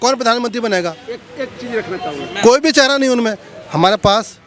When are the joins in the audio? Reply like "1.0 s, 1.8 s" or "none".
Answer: none

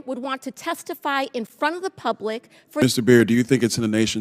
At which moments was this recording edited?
2.8 s

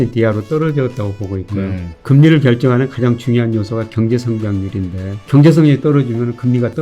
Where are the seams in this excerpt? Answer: 1.9 s, 5.3 s

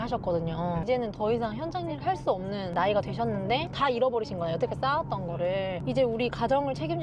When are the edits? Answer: 0.8 s, 2.7 s, 3.7 s, 5.8 s

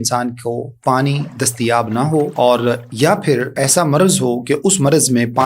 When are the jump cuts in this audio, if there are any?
2.3 s, 3.5 s

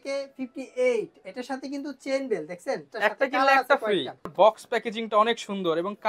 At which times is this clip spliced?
2.9 s, 4.3 s

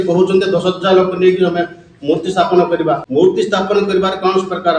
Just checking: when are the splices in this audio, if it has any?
3.0 s

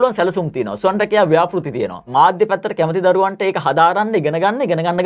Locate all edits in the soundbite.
2.0 s

